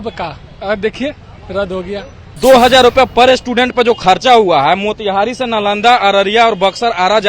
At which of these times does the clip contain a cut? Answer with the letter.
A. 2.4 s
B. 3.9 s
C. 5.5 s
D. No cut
A